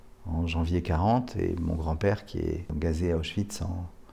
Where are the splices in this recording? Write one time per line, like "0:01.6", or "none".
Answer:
0:02.7